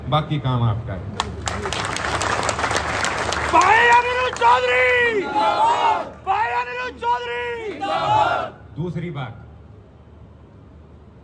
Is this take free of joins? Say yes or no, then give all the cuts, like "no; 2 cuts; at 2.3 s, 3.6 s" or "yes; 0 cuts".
yes; 0 cuts